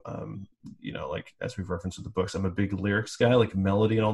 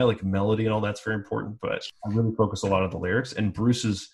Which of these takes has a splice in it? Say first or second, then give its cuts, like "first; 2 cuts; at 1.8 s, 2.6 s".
second; 1 cut; at 1.9 s